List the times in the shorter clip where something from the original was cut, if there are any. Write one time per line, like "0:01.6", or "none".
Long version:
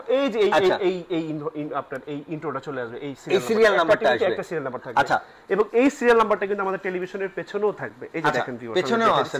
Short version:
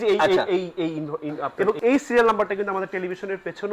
0:01.5